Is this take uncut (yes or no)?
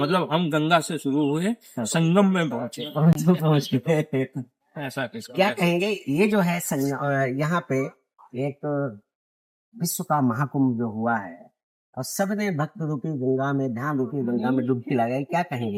yes